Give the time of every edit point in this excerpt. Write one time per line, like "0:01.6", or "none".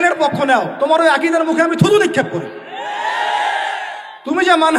none